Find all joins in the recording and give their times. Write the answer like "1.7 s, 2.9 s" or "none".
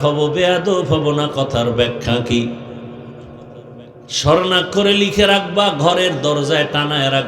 none